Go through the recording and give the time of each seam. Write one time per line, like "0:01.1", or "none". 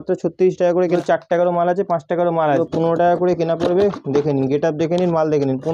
0:00.9
0:02.6